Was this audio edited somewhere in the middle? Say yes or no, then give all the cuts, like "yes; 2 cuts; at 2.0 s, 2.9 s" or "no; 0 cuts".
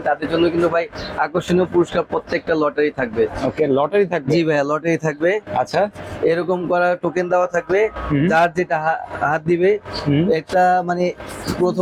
no; 0 cuts